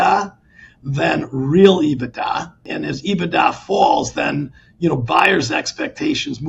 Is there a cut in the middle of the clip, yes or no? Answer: yes